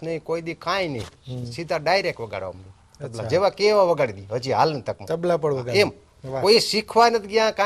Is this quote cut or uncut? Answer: uncut